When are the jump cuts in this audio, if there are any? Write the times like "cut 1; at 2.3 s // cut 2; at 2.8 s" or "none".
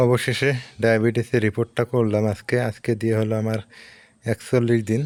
none